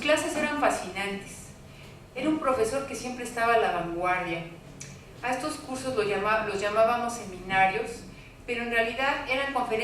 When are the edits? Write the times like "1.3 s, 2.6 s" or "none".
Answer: 6.5 s